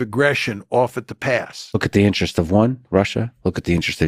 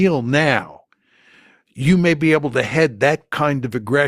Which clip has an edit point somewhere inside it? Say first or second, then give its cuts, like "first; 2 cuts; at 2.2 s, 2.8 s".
first; 1 cut; at 1.8 s